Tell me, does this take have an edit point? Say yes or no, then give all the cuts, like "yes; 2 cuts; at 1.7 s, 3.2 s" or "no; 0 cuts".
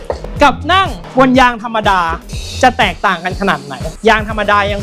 yes; 1 cut; at 3.9 s